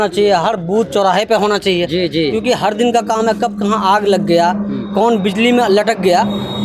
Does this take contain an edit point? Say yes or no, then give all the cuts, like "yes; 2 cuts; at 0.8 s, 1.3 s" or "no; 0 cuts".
no; 0 cuts